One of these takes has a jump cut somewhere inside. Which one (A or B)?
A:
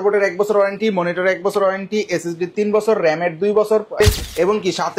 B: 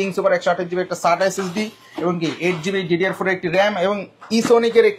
A